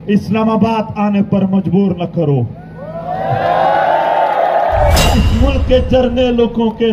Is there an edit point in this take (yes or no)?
yes